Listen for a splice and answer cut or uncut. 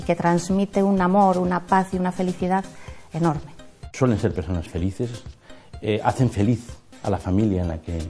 cut